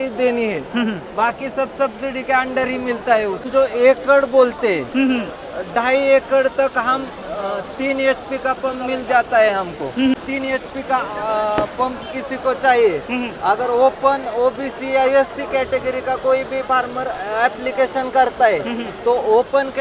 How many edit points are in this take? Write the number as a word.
two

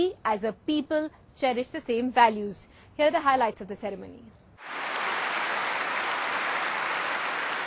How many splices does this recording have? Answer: one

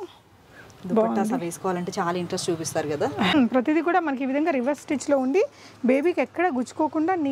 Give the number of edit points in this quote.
one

